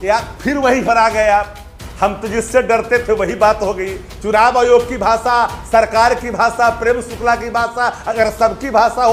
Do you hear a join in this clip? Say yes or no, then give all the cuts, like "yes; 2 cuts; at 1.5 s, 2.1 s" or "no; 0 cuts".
no; 0 cuts